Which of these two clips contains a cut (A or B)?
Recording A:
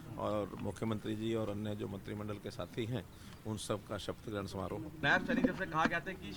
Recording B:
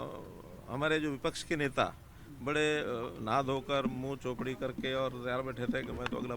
A